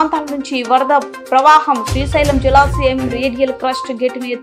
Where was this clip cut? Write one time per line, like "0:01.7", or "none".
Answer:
none

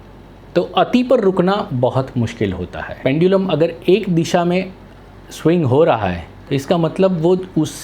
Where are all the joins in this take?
0:03.0
0:06.3

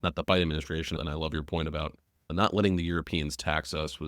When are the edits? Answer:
0:01.0
0:02.2

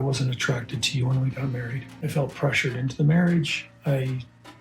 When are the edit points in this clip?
0:01.9

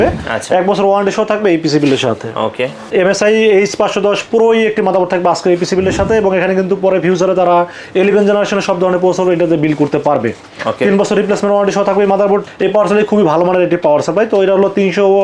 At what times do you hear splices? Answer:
0:02.9
0:12.4

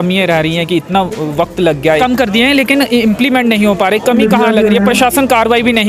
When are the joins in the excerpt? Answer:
0:02.0

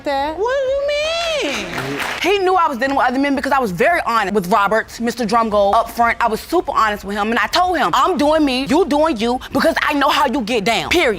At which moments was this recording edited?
0:02.2

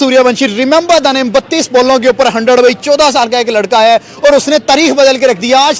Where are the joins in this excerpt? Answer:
none

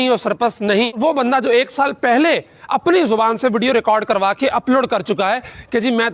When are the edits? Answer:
0:00.9

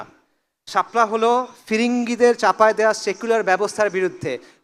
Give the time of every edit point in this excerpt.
none

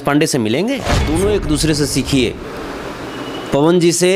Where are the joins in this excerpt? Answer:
0:00.9

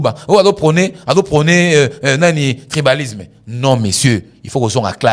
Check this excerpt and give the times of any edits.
none

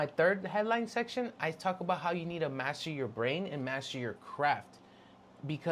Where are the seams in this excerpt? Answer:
none

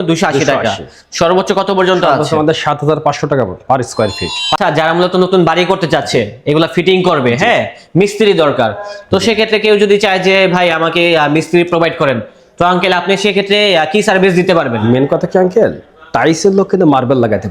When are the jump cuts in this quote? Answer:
0:04.6

